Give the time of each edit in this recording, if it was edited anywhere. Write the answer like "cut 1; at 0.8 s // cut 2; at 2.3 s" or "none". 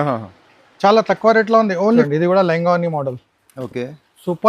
cut 1; at 2.1 s